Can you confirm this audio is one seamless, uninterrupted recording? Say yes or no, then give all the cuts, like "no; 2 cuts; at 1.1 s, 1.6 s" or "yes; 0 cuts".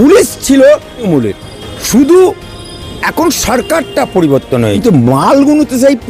no; 2 cuts; at 1.1 s, 4.8 s